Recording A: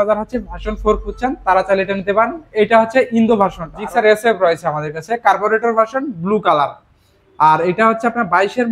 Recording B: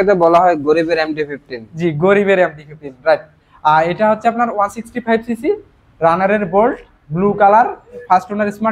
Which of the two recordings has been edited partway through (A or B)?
A